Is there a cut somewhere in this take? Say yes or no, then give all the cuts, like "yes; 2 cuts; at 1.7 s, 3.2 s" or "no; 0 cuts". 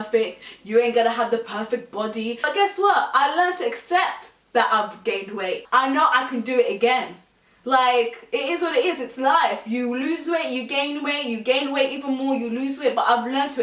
yes; 2 cuts; at 2.4 s, 5.6 s